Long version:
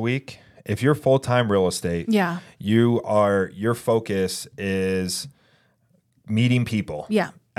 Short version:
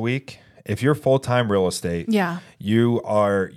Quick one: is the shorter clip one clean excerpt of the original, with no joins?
yes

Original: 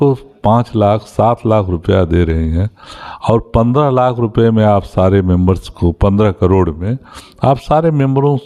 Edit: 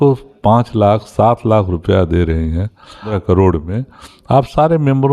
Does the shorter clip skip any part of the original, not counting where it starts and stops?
yes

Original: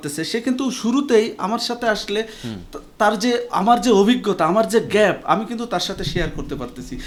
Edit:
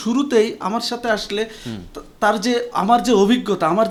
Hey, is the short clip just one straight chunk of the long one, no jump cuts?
yes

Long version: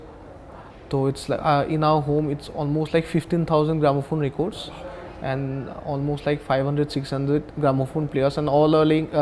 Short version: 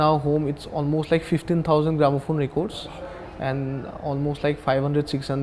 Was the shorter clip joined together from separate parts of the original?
no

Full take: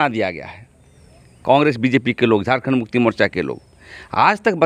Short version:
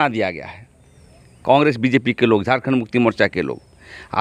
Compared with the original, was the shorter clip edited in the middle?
no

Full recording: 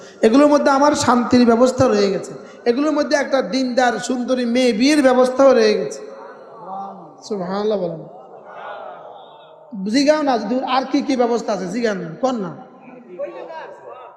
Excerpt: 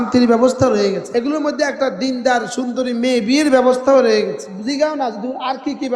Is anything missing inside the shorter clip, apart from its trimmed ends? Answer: yes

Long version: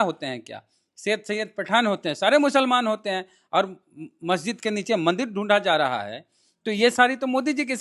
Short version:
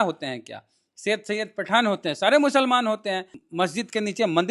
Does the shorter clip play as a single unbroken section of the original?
no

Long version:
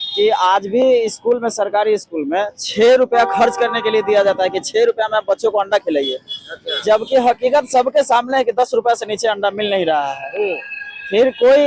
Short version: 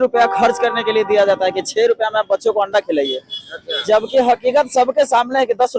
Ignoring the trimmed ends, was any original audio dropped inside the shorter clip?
no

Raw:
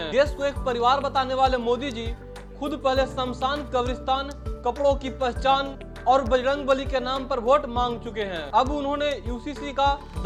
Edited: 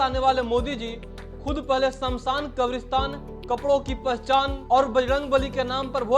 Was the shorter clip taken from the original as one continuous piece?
no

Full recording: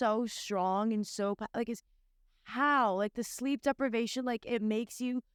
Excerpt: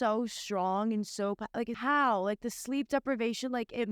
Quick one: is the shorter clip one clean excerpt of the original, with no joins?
no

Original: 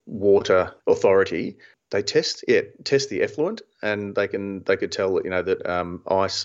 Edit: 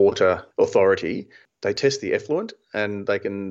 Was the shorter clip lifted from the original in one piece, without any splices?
no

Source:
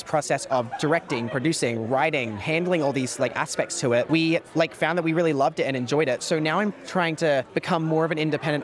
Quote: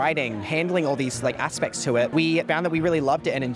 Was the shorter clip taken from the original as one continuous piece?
no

